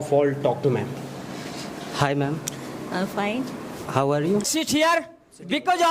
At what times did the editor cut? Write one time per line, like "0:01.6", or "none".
0:04.5

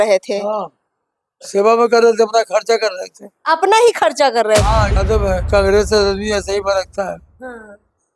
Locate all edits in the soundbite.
0:05.0

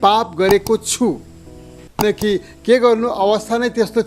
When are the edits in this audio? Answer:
0:02.0

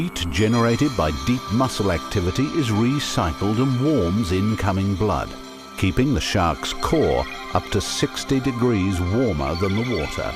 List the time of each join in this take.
0:04.2

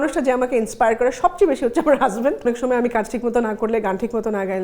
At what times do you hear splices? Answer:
0:02.4

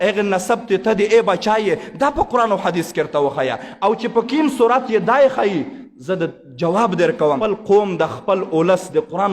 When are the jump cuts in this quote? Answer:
0:07.4

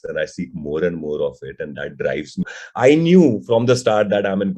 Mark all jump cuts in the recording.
0:02.5

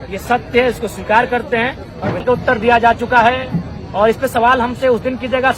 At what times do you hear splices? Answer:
0:02.2

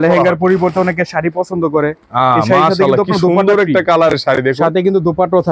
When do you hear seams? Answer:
none

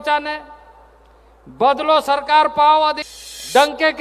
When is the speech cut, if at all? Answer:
0:03.0

